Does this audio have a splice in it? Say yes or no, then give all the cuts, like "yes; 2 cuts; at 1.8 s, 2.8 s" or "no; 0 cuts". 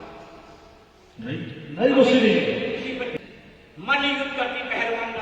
yes; 1 cut; at 3.1 s